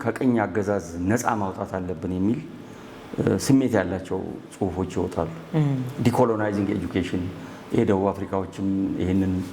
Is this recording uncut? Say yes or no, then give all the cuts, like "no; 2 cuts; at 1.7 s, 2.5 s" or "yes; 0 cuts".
yes; 0 cuts